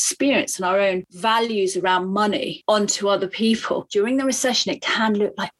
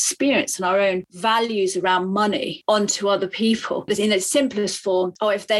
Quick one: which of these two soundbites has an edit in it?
first; 1 cut; at 3.8 s

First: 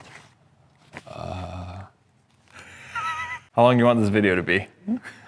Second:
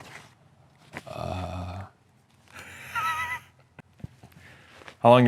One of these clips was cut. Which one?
first; 1 cut; at 3.5 s

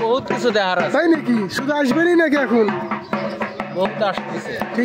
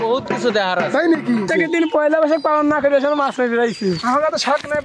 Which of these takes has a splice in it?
second; 2 cuts; at 1.5 s, 4.0 s

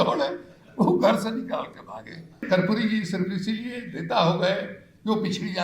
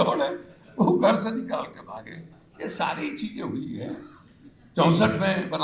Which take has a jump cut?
first; 1 cut; at 2.4 s

